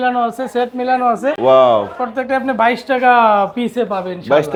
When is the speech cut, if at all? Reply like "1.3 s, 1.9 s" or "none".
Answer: none